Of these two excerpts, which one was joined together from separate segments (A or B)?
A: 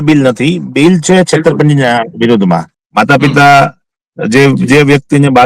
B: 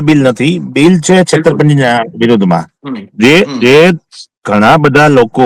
A